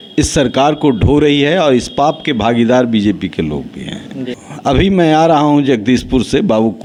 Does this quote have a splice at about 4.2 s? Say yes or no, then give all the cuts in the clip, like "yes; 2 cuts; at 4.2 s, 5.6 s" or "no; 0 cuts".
no; 0 cuts